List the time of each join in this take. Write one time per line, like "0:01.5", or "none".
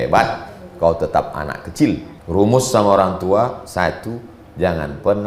0:02.1